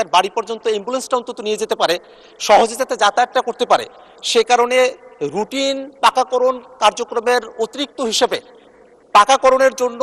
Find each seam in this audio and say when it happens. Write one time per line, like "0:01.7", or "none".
0:02.1

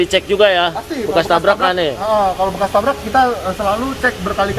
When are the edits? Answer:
none

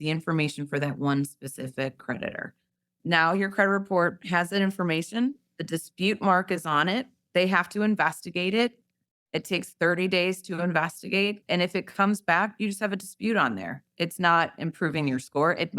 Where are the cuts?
0:02.9
0:11.4

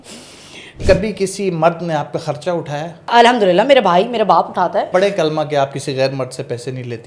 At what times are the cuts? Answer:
0:00.8
0:03.1
0:04.9

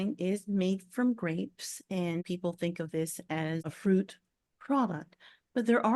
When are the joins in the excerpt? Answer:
0:02.2
0:03.7

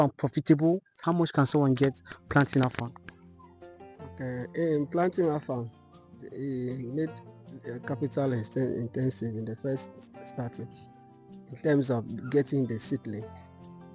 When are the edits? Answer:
0:00.9

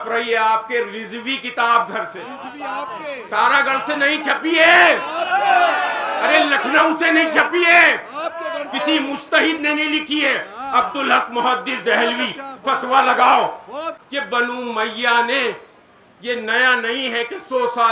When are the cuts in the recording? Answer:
0:14.0

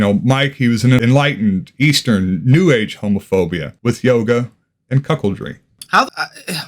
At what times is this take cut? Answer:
0:01.0
0:05.9

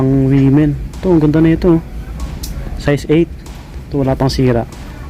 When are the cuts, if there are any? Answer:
none

